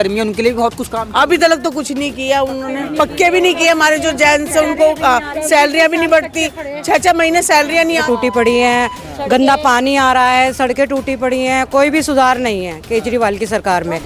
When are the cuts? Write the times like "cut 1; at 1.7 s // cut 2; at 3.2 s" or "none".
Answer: cut 1; at 8.0 s